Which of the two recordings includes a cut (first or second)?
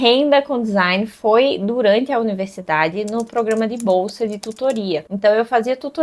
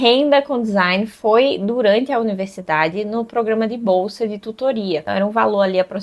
second